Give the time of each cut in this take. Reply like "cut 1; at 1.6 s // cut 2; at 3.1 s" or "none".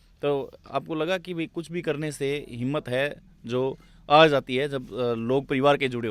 none